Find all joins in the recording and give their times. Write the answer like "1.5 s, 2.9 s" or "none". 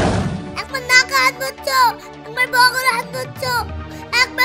none